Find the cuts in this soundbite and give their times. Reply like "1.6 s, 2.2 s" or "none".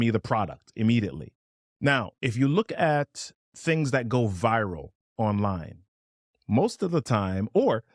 none